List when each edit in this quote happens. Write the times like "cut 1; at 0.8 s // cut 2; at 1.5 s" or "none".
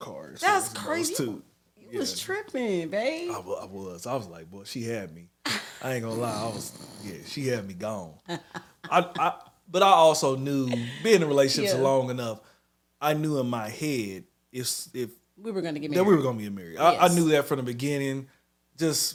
none